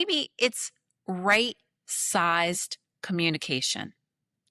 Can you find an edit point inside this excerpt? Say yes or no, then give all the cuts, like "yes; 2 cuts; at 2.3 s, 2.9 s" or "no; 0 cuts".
no; 0 cuts